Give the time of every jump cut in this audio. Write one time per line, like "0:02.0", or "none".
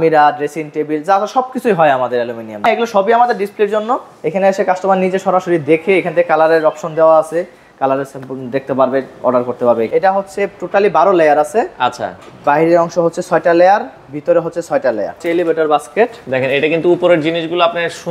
0:02.6
0:09.9
0:15.2